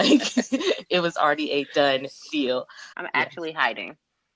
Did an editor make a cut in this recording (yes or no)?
yes